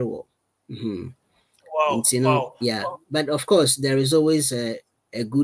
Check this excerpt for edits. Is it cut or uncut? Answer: uncut